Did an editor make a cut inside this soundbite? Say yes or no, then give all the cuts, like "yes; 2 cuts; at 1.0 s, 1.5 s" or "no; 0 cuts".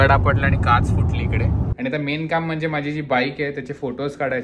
yes; 1 cut; at 1.7 s